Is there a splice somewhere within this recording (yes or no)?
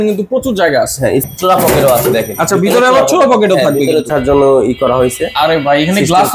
yes